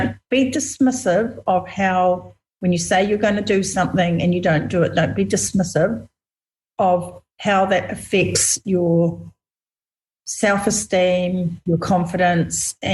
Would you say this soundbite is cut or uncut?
uncut